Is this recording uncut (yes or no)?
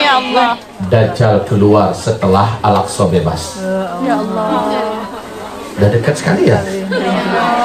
yes